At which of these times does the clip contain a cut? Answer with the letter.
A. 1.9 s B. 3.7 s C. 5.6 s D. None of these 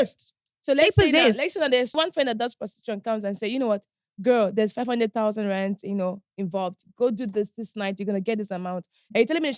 A